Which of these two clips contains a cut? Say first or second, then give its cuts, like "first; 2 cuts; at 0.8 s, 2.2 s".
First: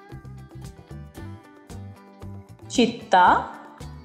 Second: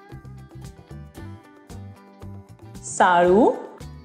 first; 1 cut; at 2.8 s